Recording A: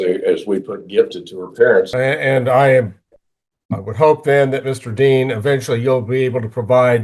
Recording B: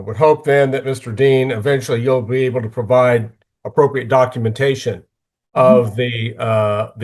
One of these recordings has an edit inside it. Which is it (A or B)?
A